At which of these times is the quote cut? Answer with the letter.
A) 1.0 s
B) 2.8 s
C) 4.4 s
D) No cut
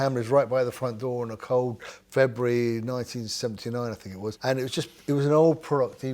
C